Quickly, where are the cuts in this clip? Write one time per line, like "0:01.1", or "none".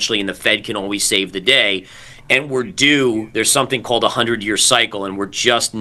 none